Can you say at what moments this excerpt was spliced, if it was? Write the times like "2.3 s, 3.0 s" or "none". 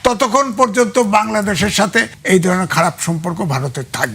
2.1 s